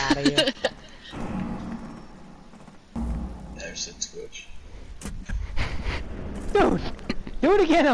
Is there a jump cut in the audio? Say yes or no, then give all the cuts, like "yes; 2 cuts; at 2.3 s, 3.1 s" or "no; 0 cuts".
yes; 1 cut; at 3.0 s